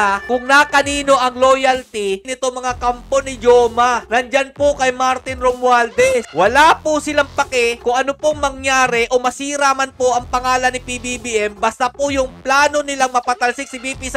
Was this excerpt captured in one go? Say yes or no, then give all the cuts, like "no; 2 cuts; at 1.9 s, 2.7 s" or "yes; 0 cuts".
yes; 0 cuts